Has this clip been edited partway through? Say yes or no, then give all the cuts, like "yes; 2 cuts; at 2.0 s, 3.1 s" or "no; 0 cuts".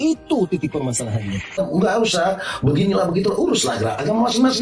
yes; 1 cut; at 1.6 s